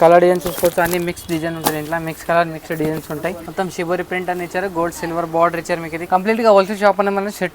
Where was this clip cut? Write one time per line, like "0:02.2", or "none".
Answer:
0:03.4
0:06.0